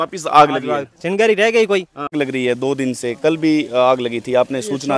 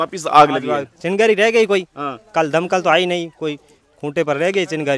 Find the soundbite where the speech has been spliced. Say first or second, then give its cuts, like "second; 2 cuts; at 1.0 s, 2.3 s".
first; 1 cut; at 2.1 s